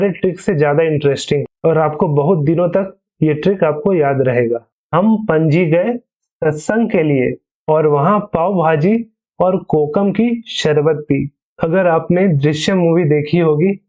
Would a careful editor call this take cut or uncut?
cut